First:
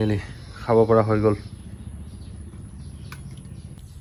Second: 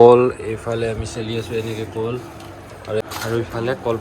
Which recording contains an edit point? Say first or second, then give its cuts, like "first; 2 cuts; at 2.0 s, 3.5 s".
second; 1 cut; at 3.0 s